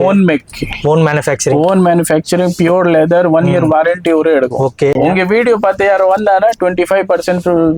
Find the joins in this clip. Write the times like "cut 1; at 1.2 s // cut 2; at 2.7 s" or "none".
cut 1; at 5.0 s